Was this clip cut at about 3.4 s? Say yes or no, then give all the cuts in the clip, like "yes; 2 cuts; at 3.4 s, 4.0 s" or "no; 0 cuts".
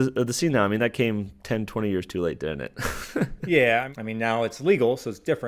yes; 2 cuts; at 3.4 s, 3.9 s